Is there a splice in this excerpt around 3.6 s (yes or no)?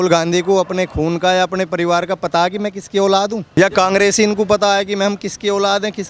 yes